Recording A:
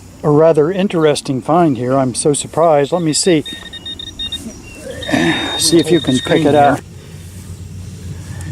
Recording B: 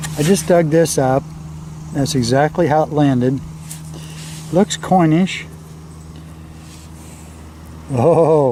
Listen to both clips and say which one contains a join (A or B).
A